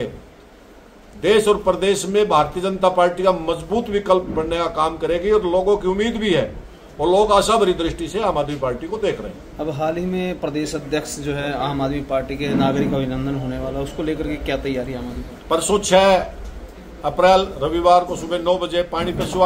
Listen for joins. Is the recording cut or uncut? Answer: uncut